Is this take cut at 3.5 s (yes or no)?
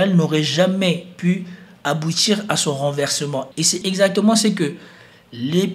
yes